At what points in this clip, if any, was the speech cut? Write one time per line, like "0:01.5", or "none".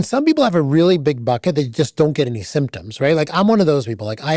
none